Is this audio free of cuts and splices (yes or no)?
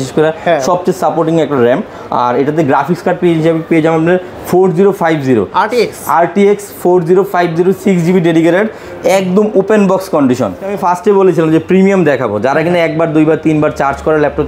no